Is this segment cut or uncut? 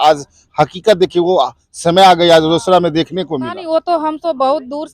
cut